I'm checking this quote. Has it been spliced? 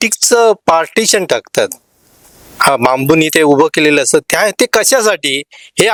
no; 0 cuts

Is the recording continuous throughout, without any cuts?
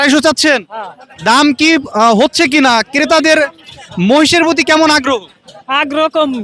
yes; 0 cuts

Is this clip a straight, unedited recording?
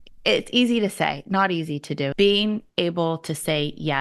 no; 1 cut; at 2.1 s

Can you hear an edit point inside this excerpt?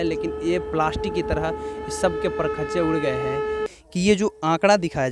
yes; 1 cut; at 3.7 s

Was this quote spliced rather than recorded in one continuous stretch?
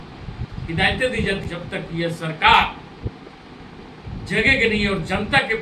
yes; 1 cut; at 1.4 s

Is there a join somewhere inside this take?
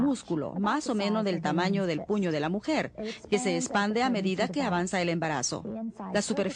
no; 0 cuts

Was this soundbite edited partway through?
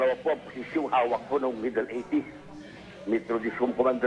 yes; 1 cut; at 1.6 s

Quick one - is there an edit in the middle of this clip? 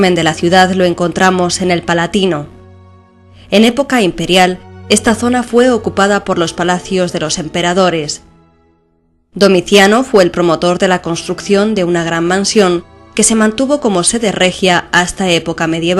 yes; 1 cut; at 2.3 s

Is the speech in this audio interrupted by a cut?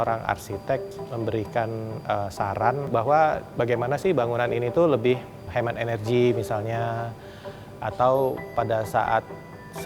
yes; 3 cuts; at 0.9 s, 2.9 s, 5.5 s

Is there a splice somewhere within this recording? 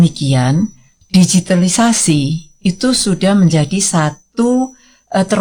no; 0 cuts

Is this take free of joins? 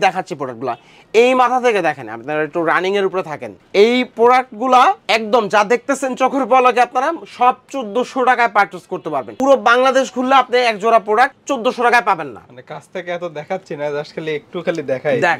yes; 0 cuts

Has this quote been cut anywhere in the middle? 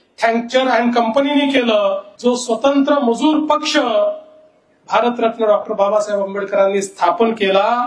yes; 1 cut; at 2.1 s

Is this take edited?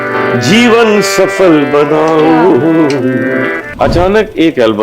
yes; 1 cut; at 3.6 s

